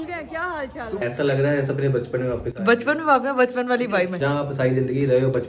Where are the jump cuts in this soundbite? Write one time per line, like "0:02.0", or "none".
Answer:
0:01.0
0:04.2